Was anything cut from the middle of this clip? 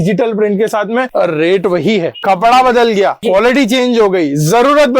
yes; 3 cuts; at 1.1 s, 2.1 s, 3.2 s

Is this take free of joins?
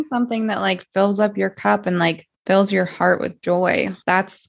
no; 1 cut; at 2.3 s

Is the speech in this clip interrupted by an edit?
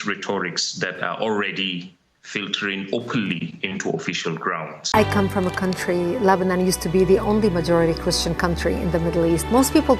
yes; 1 cut; at 4.9 s

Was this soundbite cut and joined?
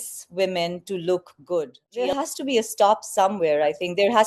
yes; 1 cut; at 2.1 s

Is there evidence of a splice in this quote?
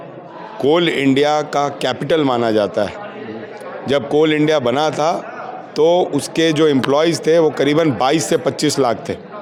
no; 0 cuts

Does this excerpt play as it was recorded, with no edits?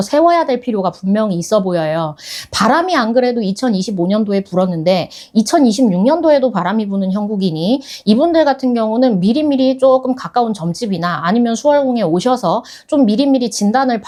yes; 0 cuts

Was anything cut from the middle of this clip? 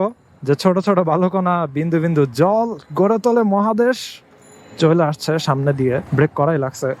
yes; 1 cut; at 6.1 s

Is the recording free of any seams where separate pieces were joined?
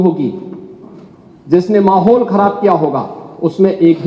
yes; 0 cuts

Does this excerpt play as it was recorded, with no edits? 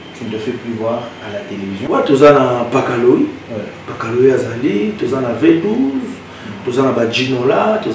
no; 1 cut; at 1.8 s

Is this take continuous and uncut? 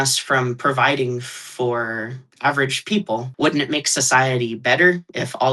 no; 1 cut; at 3.3 s

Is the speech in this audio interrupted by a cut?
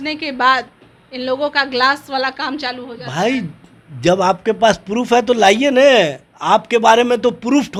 no; 0 cuts

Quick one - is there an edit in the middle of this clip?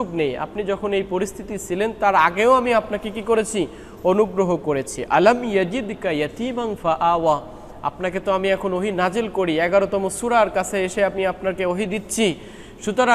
no; 0 cuts

